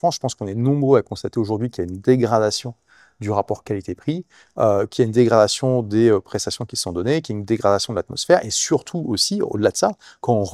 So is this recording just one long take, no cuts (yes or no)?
yes